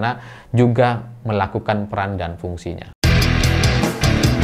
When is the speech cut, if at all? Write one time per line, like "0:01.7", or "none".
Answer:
0:02.9